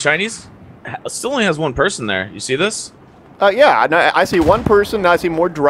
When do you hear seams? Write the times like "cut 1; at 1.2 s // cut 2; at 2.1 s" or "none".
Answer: none